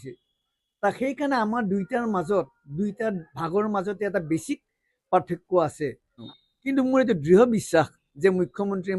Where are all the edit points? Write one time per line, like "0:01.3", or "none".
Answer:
0:06.2